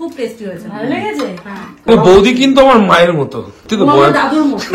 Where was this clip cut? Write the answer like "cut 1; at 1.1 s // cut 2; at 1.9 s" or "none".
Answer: cut 1; at 1.9 s // cut 2; at 3.5 s